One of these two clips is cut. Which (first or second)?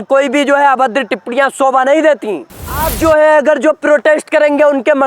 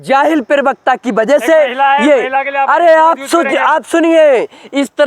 first